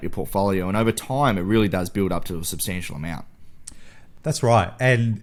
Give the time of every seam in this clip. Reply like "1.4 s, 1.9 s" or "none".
none